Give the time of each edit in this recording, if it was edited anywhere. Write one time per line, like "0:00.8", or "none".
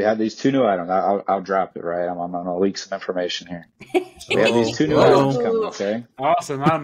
none